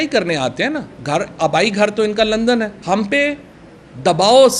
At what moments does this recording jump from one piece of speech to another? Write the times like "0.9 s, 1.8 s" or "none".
2.8 s